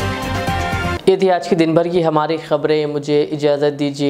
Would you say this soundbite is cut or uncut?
uncut